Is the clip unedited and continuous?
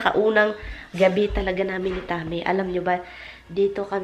yes; 0 cuts

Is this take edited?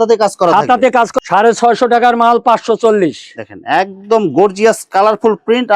yes; 1 cut; at 1.1 s

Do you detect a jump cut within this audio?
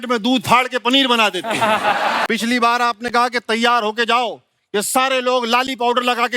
yes; 1 cut; at 2.2 s

